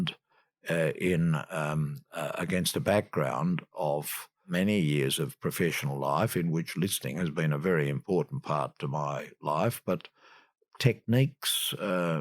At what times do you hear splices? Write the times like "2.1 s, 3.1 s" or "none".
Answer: 4.4 s